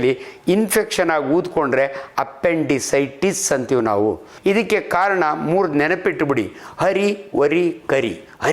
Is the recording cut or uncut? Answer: cut